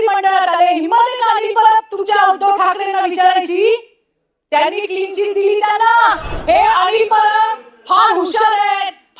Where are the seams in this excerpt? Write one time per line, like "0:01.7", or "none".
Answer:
0:06.3